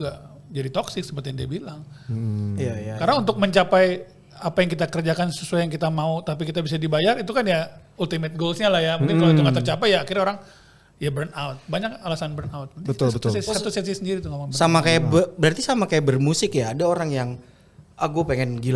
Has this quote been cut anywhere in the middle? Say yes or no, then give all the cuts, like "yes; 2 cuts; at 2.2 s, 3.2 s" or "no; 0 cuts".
no; 0 cuts